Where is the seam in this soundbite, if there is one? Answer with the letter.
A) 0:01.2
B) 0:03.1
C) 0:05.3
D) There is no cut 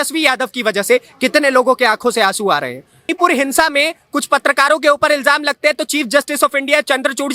B